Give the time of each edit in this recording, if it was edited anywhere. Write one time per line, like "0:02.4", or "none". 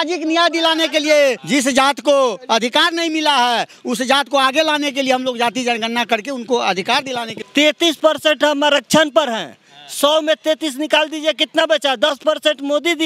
0:01.4
0:07.3